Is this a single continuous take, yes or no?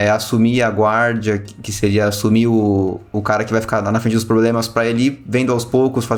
yes